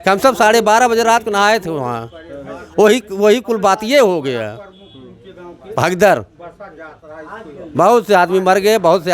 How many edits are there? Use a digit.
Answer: 0